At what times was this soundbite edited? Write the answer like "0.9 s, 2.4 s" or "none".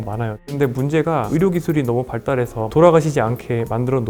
1.3 s, 2.6 s